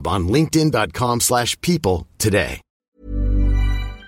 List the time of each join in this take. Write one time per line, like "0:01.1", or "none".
0:03.0